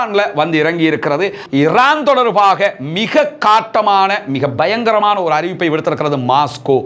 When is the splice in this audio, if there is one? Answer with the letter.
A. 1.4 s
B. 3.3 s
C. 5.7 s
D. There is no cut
A